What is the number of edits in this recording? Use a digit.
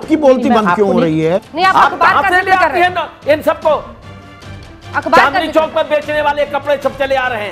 1